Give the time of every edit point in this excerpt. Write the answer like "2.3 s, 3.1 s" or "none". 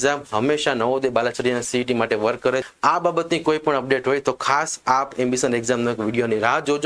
2.6 s